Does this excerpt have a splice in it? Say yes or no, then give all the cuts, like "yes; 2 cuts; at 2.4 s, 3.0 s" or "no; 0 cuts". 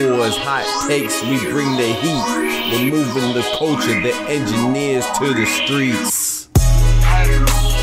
no; 0 cuts